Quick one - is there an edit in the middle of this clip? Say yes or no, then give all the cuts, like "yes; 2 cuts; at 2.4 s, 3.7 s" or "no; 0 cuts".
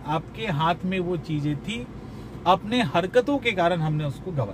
no; 0 cuts